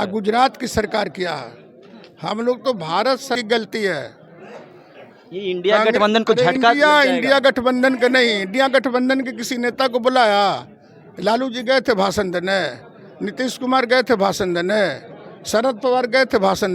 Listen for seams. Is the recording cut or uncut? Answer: cut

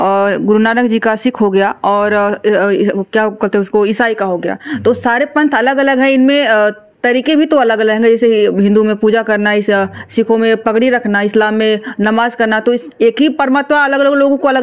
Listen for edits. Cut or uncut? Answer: uncut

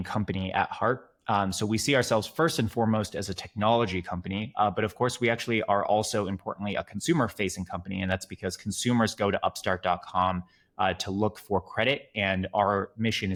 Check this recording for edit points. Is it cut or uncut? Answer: uncut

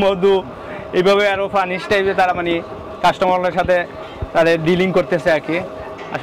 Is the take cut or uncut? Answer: uncut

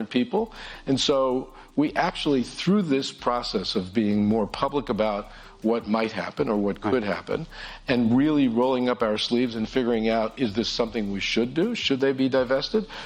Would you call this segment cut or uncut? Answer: uncut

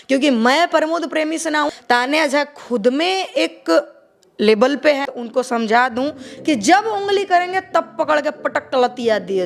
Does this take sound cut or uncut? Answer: cut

